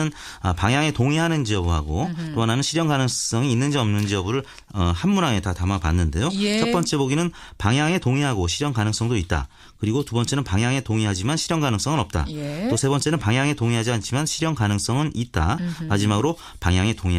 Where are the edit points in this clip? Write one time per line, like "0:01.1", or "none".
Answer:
0:02.7

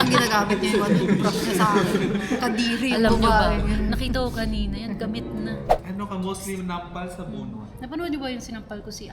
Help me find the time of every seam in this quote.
0:05.7

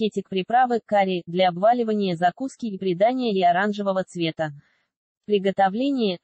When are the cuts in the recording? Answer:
0:05.1

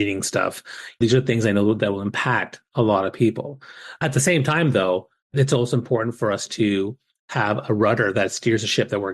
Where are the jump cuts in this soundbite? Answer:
0:01.0
0:04.0
0:05.3

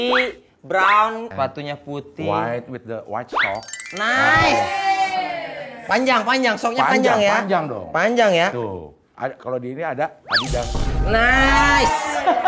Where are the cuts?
0:01.3

